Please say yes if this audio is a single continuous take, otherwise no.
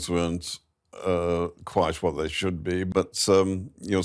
no